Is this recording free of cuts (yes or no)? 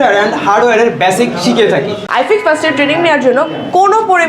no